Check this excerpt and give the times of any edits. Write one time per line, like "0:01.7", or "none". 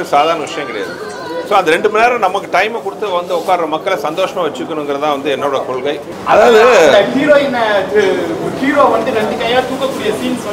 0:06.1

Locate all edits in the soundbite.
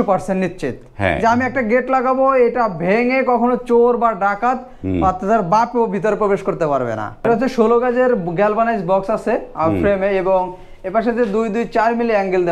0:07.3

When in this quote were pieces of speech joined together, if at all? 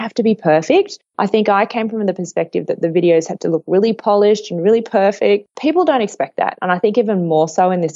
0:05.5

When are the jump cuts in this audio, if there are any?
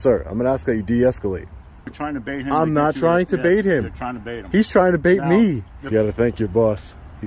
0:01.9
0:05.7

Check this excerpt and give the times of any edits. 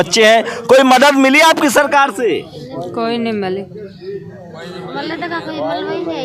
none

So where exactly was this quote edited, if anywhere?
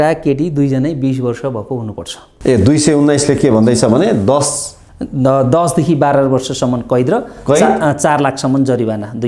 0:02.2

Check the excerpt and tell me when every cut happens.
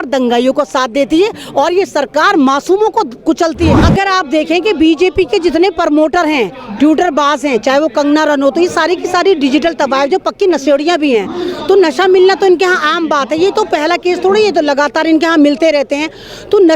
0:03.8

